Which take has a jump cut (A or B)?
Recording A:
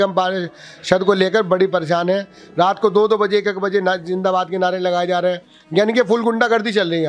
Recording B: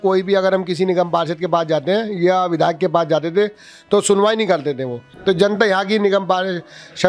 B